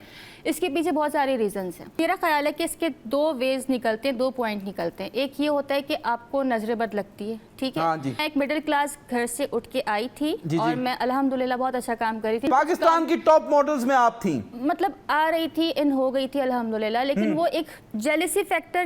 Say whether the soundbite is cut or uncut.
cut